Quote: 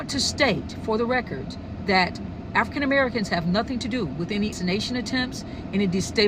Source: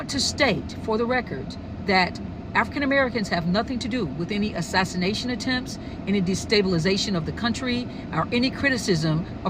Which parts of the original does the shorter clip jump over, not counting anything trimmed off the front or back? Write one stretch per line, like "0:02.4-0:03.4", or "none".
0:04.5-0:04.9